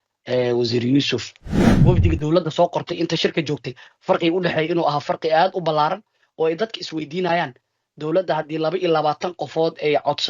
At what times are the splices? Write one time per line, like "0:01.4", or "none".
0:01.6

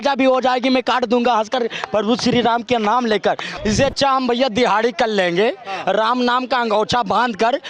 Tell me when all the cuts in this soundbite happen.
0:03.5

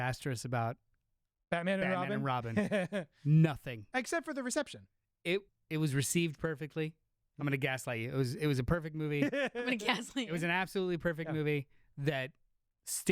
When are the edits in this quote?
0:05.6

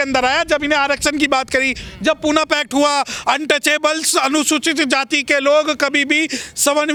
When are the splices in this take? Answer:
none

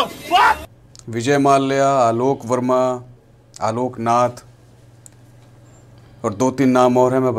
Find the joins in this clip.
none

